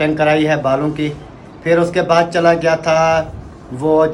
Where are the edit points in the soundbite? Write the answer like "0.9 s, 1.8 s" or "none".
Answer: none